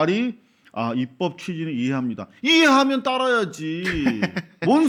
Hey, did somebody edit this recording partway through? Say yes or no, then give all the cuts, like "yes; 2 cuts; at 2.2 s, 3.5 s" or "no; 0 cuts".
no; 0 cuts